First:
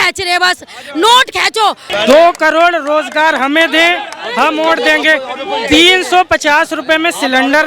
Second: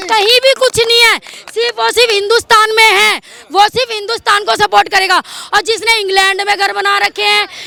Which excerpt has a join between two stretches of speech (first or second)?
first